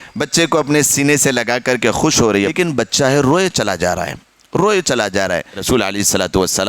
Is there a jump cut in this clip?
yes; 2 cuts; at 2.5 s, 5.6 s

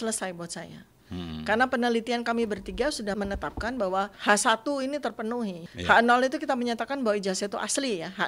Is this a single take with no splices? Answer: no; 3 cuts; at 3.1 s, 4.2 s, 5.6 s

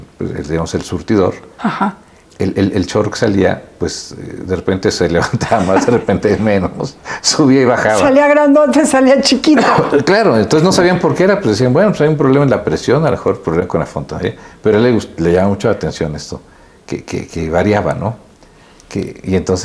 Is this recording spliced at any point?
no; 0 cuts

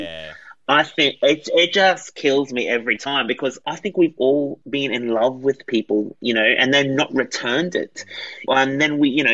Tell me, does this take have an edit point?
yes; 2 cuts; at 3.6 s, 8.4 s

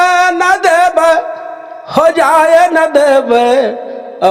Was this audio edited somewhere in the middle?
no; 0 cuts

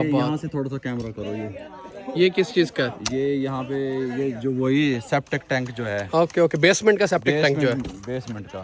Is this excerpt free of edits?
yes; 0 cuts

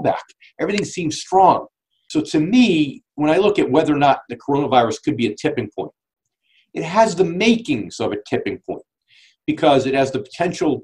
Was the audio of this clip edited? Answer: yes; 1 cut; at 2.0 s

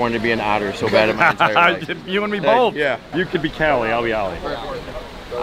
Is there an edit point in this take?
no; 0 cuts

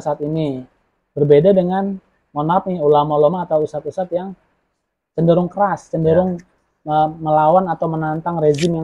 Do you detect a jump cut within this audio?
no; 0 cuts

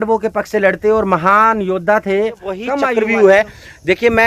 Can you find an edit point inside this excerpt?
yes; 1 cut; at 2.7 s

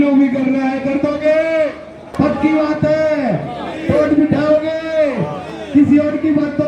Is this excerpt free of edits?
no; 1 cut; at 2.0 s

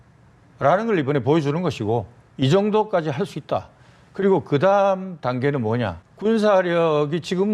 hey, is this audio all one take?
no; 1 cut; at 6.0 s

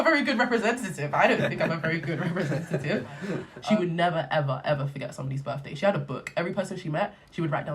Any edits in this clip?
yes; 1 cut; at 3.5 s

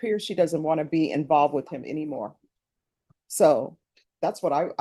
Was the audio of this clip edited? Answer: no; 0 cuts

